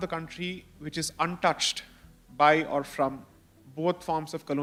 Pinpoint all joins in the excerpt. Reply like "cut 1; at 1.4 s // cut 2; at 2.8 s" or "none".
none

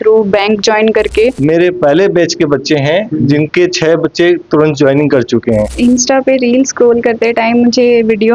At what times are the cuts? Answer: cut 1; at 1.4 s // cut 2; at 5.8 s

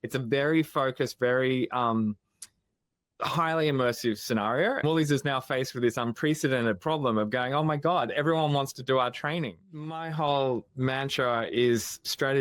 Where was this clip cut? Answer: cut 1; at 4.8 s // cut 2; at 10.0 s

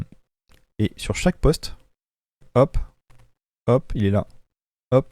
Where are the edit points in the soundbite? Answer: cut 1; at 2.4 s

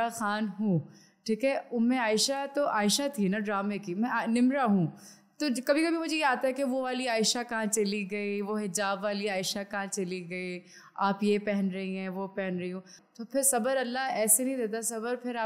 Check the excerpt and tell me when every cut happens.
cut 1; at 13.0 s

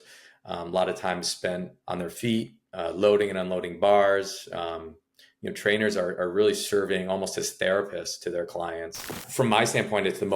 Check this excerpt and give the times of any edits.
cut 1; at 9.2 s

